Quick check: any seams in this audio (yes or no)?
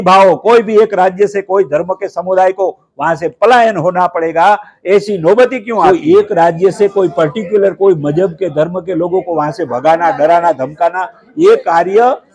yes